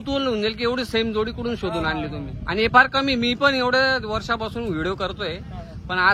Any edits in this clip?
no; 0 cuts

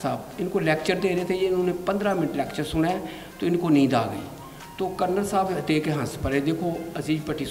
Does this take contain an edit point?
no; 0 cuts

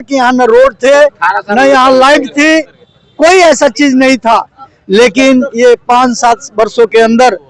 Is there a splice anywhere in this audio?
no; 0 cuts

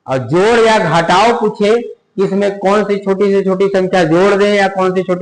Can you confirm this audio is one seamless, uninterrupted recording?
yes; 0 cuts

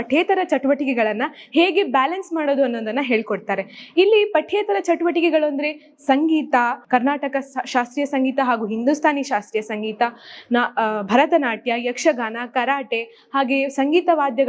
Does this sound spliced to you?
no; 0 cuts

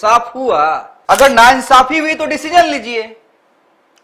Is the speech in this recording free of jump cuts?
no; 1 cut; at 0.9 s

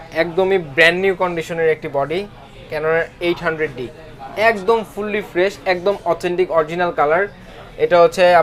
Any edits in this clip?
no; 0 cuts

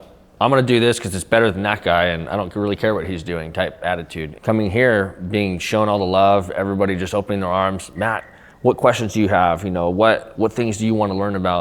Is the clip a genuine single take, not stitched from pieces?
no; 1 cut; at 4.3 s

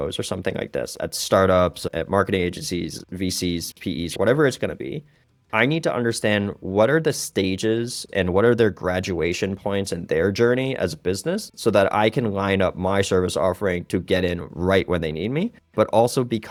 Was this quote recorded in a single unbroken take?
yes; 0 cuts

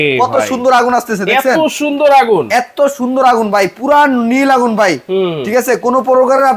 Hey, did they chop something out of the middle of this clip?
no; 0 cuts

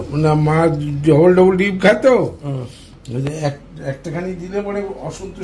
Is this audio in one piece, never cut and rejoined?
yes; 0 cuts

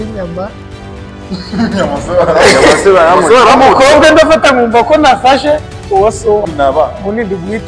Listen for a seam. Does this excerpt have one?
yes; 1 cut; at 6.5 s

